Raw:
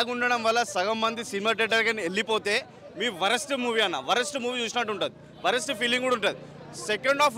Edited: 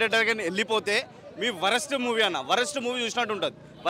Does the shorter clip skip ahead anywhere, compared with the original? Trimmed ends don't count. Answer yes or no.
no